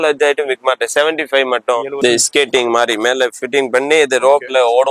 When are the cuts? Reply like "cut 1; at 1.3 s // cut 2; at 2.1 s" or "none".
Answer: cut 1; at 2.0 s